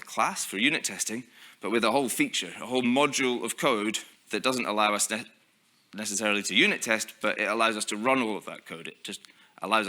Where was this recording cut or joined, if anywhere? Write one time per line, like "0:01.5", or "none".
0:04.1